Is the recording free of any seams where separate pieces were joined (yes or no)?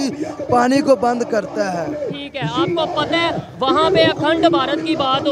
yes